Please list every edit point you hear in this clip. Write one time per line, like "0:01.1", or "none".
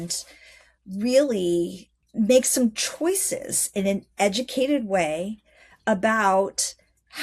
0:02.0

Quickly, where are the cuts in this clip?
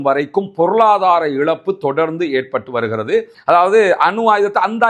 0:03.3

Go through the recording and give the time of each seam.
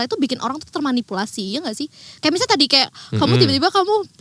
none

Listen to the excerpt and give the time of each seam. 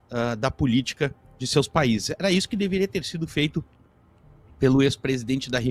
none

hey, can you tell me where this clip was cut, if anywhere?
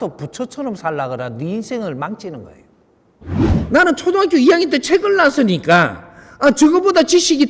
0:03.5

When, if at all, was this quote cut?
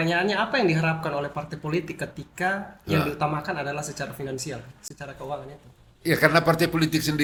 none

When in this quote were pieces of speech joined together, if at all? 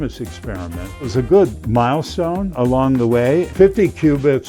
0:01.1
0:02.5
0:03.5

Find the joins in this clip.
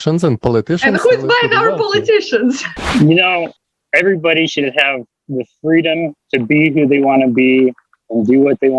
0:02.7
0:03.6

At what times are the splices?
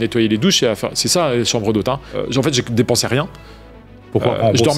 0:02.2

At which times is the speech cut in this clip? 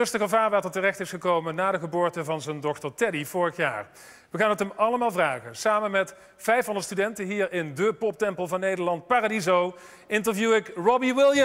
0:02.1

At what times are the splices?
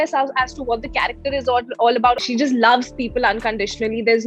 0:02.2

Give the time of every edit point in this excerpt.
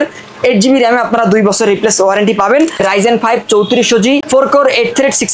0:02.7
0:04.3

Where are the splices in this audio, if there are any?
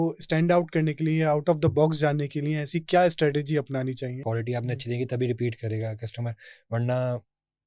0:04.2

